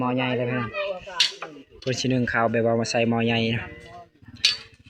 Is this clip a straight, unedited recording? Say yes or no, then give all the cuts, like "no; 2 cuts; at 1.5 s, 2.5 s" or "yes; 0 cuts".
yes; 0 cuts